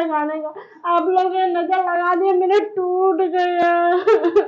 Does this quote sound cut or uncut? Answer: uncut